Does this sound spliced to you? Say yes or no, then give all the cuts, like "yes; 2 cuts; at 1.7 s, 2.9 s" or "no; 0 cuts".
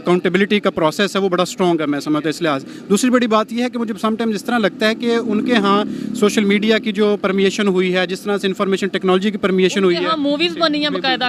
no; 0 cuts